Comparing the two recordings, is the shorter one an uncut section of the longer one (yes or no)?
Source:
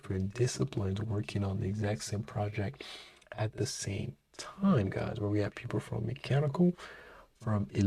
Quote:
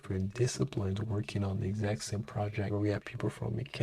no